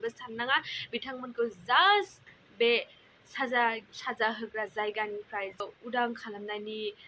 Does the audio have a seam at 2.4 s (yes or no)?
no